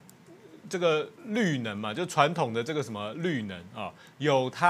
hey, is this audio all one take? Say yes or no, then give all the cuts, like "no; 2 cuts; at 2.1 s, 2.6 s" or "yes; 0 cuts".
yes; 0 cuts